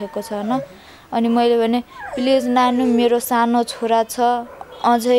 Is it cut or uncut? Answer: uncut